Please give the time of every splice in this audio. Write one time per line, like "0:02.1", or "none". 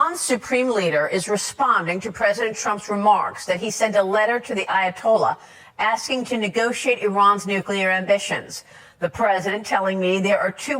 0:08.5